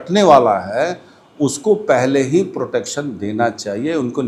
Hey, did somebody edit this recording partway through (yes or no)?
no